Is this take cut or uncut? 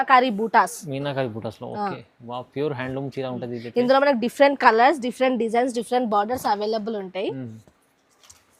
uncut